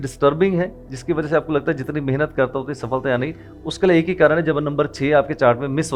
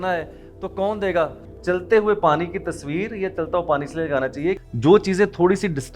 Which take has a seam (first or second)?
second